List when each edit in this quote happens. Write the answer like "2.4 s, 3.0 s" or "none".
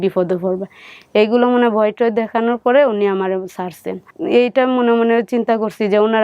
4.1 s